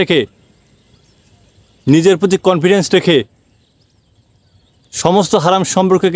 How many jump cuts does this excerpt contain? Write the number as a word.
zero